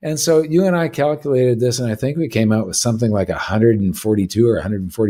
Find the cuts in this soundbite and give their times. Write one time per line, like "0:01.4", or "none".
none